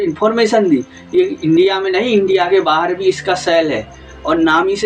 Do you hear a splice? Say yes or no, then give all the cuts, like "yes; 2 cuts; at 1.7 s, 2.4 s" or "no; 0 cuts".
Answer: no; 0 cuts